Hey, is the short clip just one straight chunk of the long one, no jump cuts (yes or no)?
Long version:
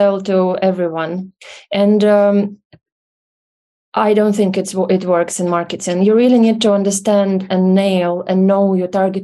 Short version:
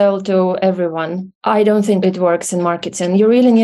no